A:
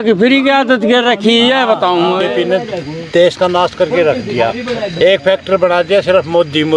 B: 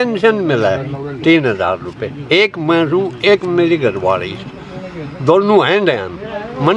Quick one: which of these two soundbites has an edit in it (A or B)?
A